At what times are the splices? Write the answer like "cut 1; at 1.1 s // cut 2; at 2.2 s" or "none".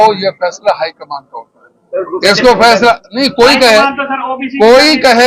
none